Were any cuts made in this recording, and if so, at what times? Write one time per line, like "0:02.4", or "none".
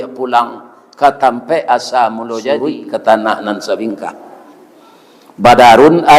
0:03.0